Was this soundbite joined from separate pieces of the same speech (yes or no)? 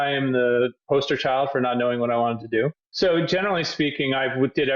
yes